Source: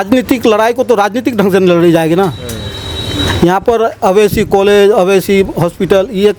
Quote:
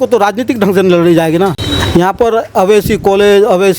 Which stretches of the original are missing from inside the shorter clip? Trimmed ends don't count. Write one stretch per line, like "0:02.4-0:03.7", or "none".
0:02.4-0:03.1